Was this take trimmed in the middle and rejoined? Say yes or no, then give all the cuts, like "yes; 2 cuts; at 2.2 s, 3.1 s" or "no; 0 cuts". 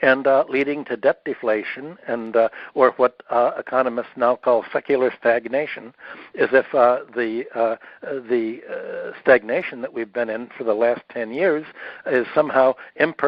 no; 0 cuts